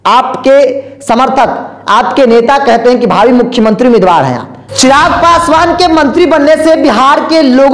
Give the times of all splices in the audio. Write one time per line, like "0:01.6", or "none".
0:04.6